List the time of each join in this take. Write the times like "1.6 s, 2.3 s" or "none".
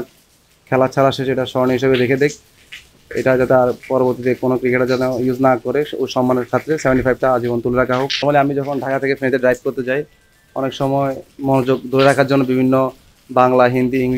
8.2 s